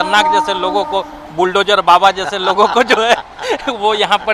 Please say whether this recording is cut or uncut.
uncut